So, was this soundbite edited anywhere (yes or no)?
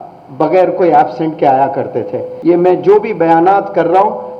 yes